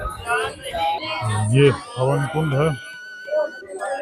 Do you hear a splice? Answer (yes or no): yes